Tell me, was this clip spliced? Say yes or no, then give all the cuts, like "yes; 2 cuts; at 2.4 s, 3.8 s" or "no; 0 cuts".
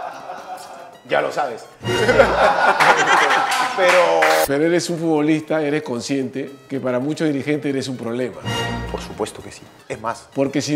yes; 2 cuts; at 4.4 s, 6.6 s